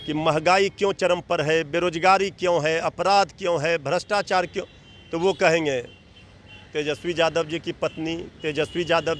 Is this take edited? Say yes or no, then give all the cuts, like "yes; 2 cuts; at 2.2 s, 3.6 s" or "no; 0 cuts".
no; 0 cuts